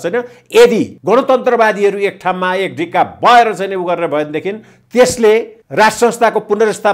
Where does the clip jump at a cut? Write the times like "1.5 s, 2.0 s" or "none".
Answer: 0.9 s, 5.6 s